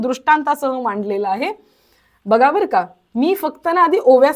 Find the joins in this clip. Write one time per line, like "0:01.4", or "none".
none